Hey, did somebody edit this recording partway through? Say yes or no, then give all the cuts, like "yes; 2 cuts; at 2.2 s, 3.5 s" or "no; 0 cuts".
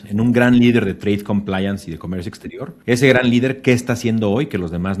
no; 0 cuts